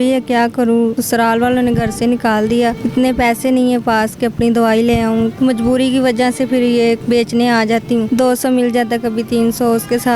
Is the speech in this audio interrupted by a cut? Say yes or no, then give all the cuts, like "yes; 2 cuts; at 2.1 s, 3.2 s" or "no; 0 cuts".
yes; 5 cuts; at 1.0 s, 2.8 s, 5.3 s, 7.0 s, 8.1 s